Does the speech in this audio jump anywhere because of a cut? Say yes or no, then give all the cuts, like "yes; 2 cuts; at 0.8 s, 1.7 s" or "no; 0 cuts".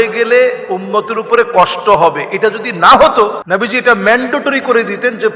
yes; 1 cut; at 3.4 s